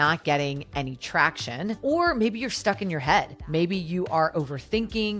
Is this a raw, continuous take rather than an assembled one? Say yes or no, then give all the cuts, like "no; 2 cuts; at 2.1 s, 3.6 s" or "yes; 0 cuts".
yes; 0 cuts